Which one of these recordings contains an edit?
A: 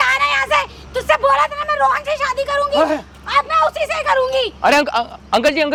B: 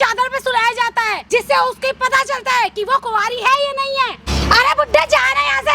B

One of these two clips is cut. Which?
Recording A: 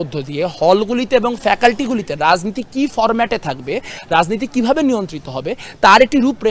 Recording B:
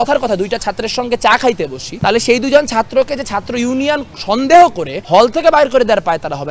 B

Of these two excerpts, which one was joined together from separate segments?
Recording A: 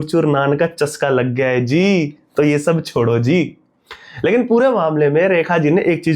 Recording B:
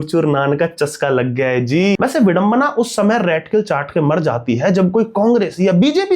B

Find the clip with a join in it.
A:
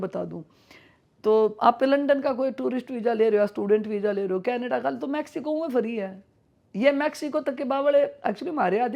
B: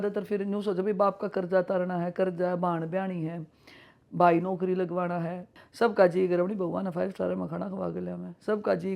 B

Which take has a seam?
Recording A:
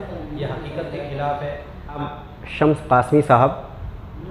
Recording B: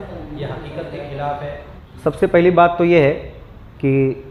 A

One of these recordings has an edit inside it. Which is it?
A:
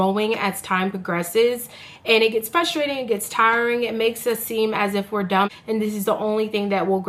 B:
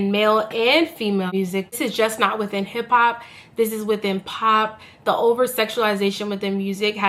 B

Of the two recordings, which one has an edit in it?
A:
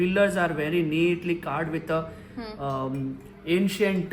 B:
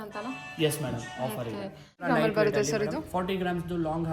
B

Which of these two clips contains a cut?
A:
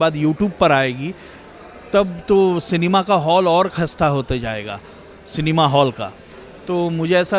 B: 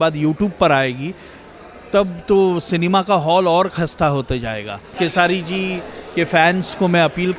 B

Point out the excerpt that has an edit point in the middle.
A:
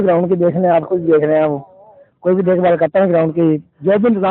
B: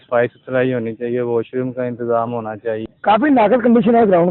B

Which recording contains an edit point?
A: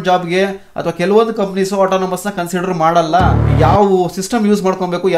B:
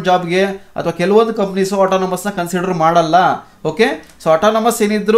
A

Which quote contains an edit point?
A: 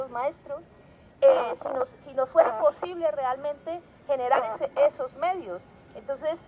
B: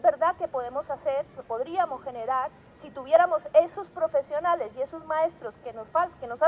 B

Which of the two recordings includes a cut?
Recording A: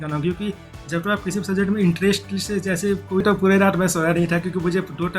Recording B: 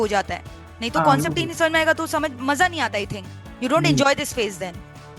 A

